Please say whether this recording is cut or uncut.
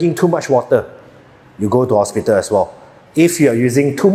uncut